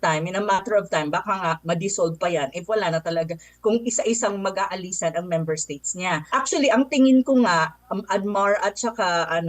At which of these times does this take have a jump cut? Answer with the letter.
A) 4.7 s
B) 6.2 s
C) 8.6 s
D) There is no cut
B